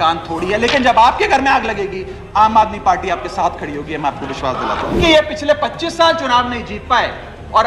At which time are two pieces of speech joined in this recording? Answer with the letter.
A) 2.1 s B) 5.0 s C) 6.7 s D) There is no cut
B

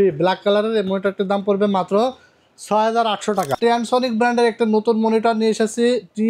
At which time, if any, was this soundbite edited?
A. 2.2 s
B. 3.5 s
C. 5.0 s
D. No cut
B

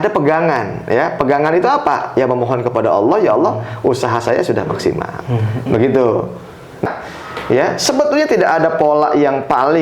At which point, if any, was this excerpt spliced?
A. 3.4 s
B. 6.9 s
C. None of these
B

